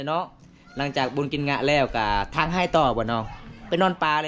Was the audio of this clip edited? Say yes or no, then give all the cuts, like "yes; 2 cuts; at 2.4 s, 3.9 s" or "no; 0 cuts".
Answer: no; 0 cuts